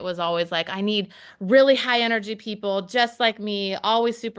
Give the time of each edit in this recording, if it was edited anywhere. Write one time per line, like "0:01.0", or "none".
none